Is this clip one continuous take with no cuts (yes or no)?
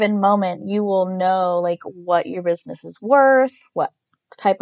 yes